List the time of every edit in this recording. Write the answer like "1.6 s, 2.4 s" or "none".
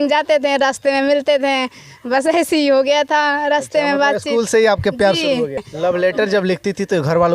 5.6 s